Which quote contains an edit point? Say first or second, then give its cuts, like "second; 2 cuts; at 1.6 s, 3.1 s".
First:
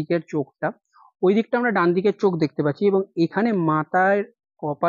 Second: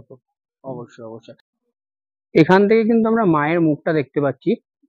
second; 1 cut; at 1.4 s